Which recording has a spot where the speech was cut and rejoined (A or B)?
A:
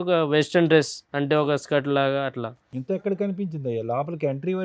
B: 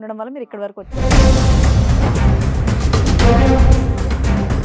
B